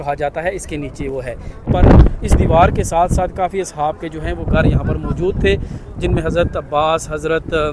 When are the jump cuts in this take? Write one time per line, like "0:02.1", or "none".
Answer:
none